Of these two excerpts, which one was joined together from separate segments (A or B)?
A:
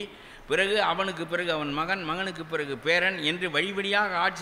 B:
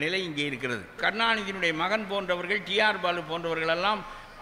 B